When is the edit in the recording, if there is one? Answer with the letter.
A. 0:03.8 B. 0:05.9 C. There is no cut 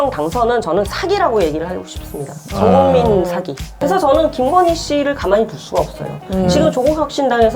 A